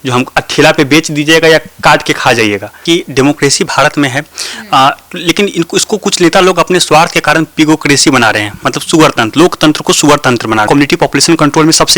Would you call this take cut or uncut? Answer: cut